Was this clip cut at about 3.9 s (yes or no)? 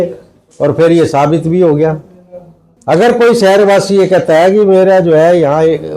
no